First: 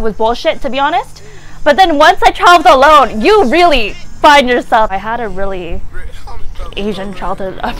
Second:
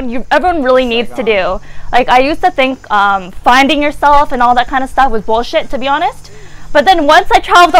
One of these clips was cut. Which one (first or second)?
first